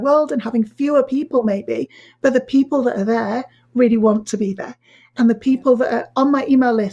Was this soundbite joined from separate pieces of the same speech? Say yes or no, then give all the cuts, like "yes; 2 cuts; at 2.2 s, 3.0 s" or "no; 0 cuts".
no; 0 cuts